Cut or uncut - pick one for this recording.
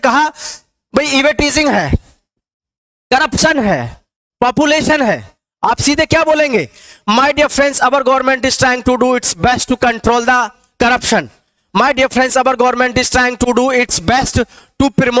uncut